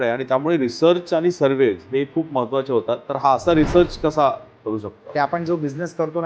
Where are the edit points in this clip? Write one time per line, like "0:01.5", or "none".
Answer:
0:03.1
0:05.0